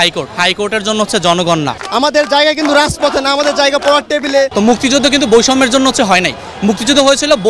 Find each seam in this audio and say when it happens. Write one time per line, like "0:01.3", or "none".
0:01.7
0:04.5